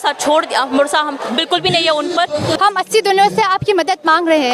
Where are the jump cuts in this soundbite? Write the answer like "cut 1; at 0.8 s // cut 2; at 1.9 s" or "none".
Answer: cut 1; at 2.5 s